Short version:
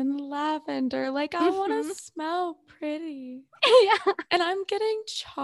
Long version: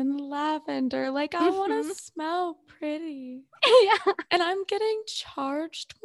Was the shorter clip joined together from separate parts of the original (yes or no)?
no